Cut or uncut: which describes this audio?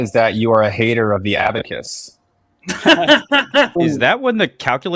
cut